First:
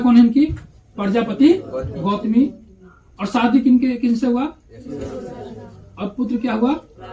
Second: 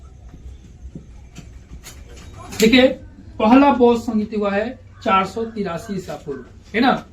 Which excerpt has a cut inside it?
second; 1 cut; at 2.5 s

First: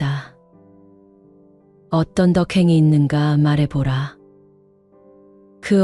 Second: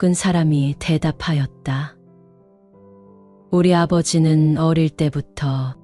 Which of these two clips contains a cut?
second; 2 cuts; at 2.0 s, 3.5 s

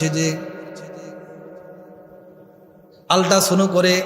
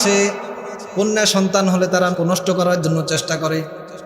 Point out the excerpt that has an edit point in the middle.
second; 1 cut; at 2.1 s

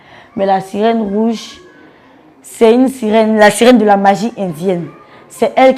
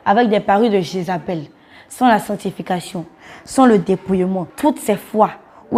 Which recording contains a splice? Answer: second; 1 cut; at 4.5 s

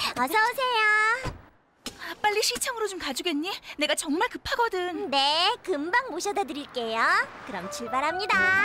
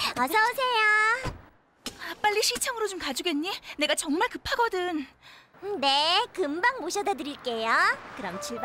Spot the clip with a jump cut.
first; 1 cut; at 5.0 s

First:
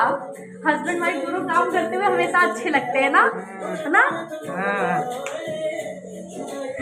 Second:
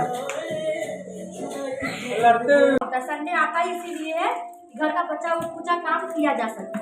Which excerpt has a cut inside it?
second; 1 cut; at 2.8 s

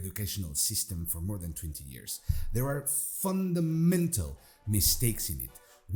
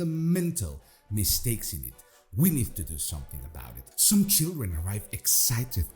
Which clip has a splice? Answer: second; 1 cut; at 3.9 s

